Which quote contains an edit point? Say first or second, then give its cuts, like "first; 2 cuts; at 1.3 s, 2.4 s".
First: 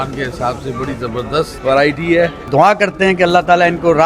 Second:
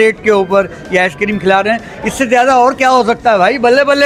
first; 2 cuts; at 1.5 s, 2.4 s